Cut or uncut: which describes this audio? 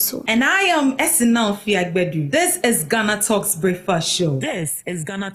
cut